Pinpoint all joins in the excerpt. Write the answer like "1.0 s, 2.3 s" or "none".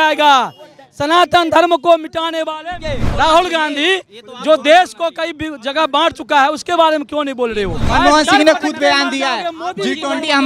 3.0 s, 7.8 s

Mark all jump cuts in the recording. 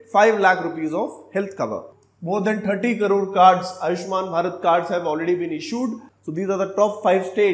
1.9 s, 6.1 s

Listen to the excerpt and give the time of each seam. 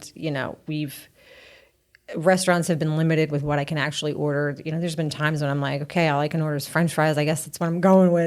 none

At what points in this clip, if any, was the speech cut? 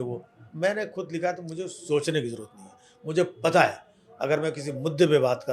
none

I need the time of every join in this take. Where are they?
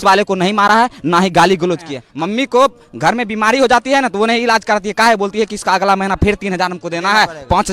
2.0 s

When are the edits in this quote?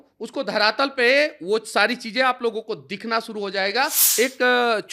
4.0 s

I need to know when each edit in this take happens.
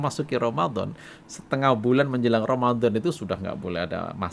none

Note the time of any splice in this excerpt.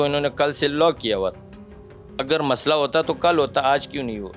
none

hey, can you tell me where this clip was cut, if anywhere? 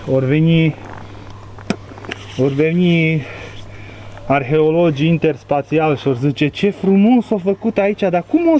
none

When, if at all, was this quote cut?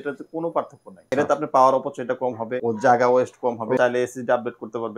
1.1 s, 2.5 s, 3.8 s

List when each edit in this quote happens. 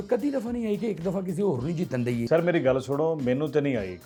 none

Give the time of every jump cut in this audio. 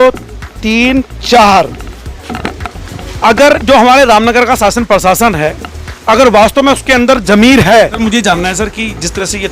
8.0 s

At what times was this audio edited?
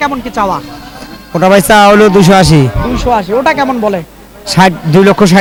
none

